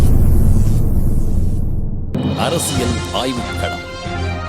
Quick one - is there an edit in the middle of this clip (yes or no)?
yes